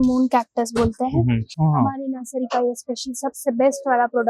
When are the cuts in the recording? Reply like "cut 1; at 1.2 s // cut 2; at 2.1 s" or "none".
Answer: cut 1; at 1.5 s